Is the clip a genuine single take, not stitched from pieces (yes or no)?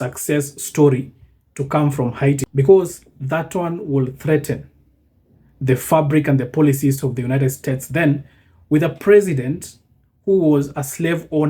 yes